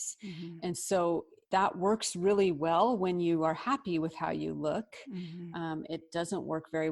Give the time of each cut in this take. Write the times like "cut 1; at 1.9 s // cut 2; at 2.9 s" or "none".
cut 1; at 1.4 s